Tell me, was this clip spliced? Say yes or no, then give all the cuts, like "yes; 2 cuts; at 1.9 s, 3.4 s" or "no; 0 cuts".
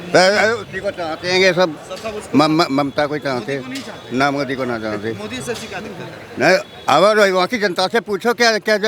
no; 0 cuts